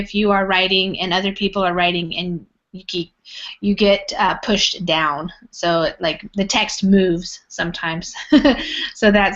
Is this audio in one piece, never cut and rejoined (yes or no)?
no